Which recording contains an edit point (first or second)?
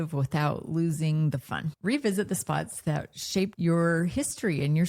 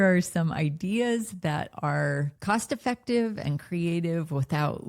first